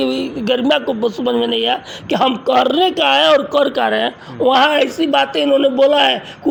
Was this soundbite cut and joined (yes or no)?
no